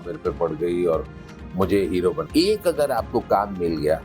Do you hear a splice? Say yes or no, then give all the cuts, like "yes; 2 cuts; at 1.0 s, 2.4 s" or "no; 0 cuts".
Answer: yes; 1 cut; at 2.2 s